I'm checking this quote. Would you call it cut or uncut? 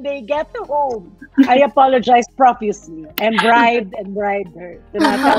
uncut